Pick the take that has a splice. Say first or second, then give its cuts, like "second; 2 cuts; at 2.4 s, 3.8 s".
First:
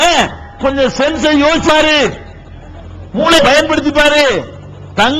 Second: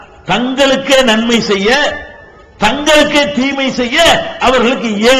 first; 2 cuts; at 1.7 s, 3.4 s